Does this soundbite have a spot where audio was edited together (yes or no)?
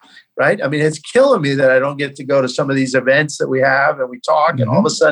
no